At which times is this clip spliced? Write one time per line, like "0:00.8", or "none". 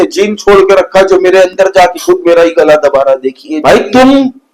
0:03.5